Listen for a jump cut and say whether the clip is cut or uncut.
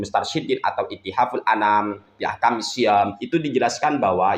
cut